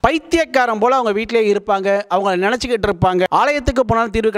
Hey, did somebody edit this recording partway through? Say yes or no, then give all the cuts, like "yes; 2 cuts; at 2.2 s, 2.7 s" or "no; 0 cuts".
yes; 1 cut; at 3.3 s